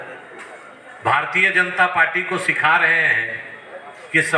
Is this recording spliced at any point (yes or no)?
no